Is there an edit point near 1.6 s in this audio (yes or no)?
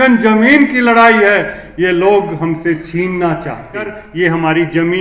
no